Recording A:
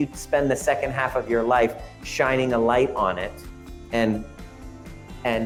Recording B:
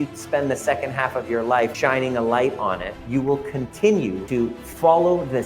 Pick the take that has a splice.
B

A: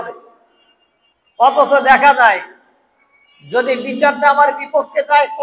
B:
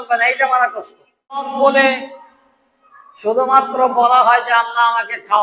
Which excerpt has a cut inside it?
B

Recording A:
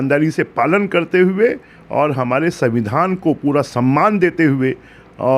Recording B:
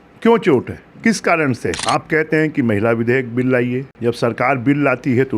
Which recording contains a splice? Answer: B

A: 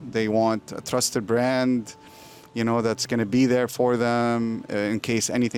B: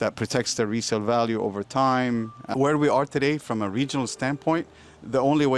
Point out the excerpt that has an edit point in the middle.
B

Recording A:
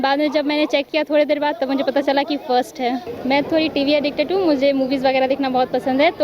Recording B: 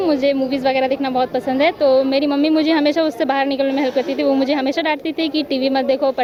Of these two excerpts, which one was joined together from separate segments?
A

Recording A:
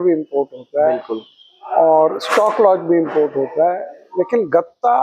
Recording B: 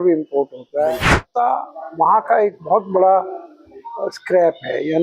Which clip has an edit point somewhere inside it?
B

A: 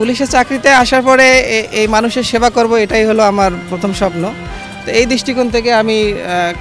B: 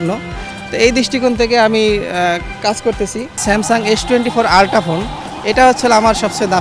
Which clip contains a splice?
B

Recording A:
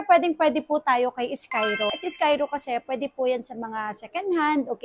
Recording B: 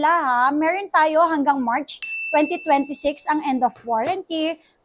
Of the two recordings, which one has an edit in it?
A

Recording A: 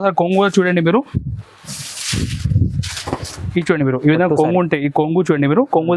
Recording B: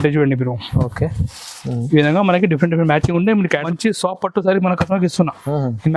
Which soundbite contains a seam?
B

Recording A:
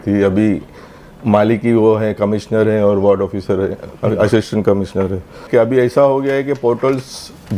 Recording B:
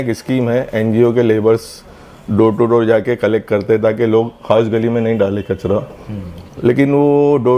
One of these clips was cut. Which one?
A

